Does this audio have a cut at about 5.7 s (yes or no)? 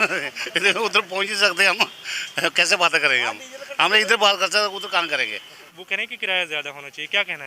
yes